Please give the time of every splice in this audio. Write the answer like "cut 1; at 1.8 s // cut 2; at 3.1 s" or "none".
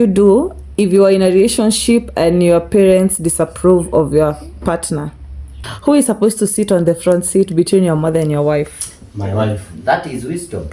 cut 1; at 5.6 s

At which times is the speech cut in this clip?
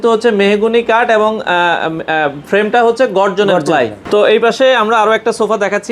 cut 1; at 4.0 s

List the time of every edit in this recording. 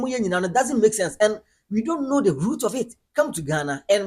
cut 1; at 3.0 s

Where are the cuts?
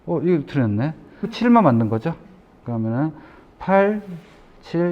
cut 1; at 1.3 s

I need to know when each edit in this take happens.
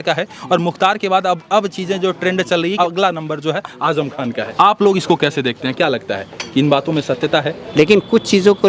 cut 1; at 2.7 s // cut 2; at 4.5 s // cut 3; at 7.6 s

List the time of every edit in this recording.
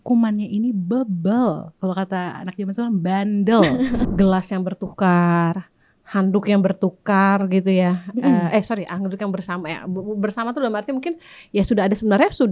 cut 1; at 4.1 s

